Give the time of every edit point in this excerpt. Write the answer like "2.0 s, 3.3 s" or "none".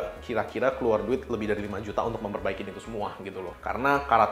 none